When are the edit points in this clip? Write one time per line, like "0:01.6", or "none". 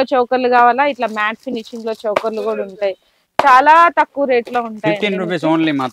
none